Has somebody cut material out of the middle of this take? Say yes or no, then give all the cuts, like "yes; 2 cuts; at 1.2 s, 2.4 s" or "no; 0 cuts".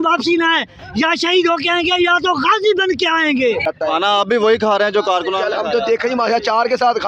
yes; 1 cut; at 3.7 s